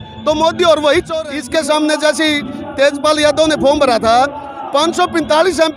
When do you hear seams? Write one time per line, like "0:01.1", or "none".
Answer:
0:01.1

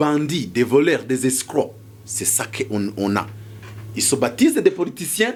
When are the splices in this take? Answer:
none

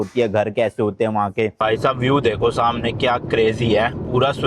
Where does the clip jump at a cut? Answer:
0:01.6

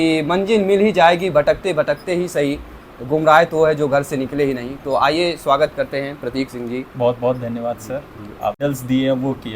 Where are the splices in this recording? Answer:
0:08.6

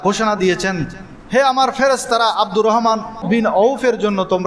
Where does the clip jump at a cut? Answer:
0:03.2

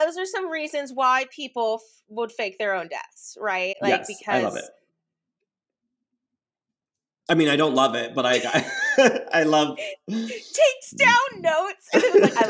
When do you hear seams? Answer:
none

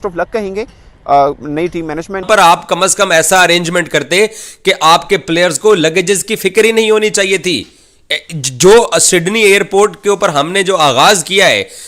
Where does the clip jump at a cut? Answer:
0:02.2

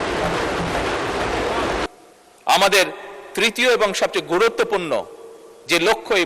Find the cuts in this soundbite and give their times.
0:01.9

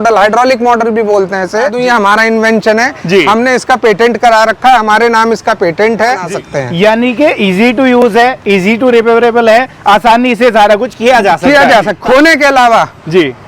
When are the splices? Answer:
0:01.7
0:06.2
0:12.0

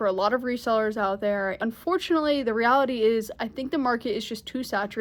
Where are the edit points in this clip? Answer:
0:01.6

